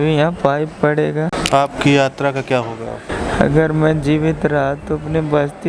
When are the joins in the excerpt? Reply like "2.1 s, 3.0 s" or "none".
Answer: 1.4 s, 3.1 s